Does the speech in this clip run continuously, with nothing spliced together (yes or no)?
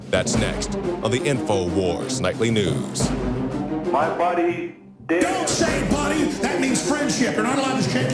no